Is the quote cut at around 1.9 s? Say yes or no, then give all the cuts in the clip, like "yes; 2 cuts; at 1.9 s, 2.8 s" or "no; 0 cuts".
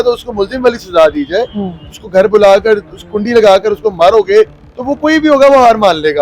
yes; 1 cut; at 1.9 s